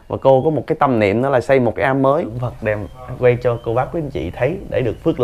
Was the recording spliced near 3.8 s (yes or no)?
no